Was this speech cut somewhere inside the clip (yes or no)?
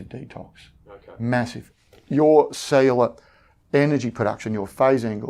yes